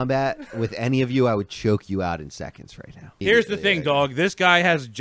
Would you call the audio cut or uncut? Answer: cut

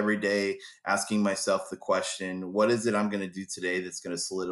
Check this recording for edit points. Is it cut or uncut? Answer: uncut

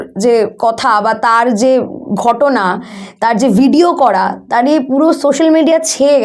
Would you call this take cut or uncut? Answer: uncut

